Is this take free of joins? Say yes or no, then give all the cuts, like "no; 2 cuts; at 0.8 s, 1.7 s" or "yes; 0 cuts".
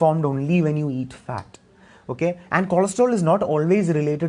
yes; 0 cuts